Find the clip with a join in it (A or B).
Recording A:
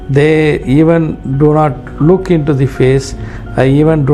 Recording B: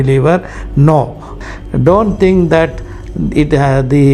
B